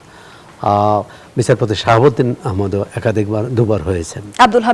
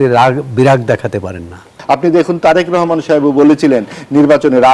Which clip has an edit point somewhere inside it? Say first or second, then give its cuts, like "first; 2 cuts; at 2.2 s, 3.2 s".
second; 1 cut; at 1.7 s